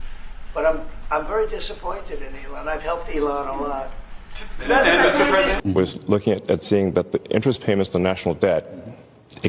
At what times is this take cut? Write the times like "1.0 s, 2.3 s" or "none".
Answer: 5.6 s